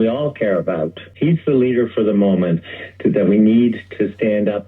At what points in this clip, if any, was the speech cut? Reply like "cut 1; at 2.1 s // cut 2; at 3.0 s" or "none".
cut 1; at 1.0 s